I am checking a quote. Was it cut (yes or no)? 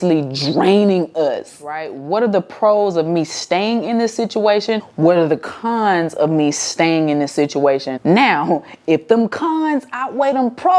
yes